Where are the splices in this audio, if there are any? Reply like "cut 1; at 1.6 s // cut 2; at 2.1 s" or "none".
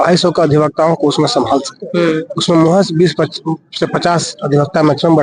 none